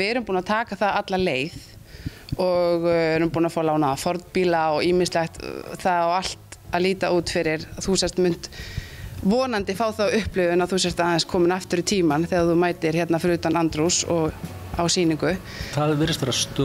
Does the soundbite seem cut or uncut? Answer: cut